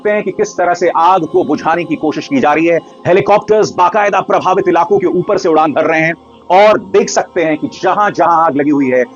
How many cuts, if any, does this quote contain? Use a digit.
0